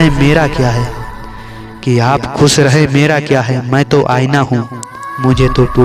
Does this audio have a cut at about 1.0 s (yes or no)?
no